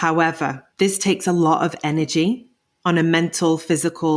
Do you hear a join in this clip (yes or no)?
no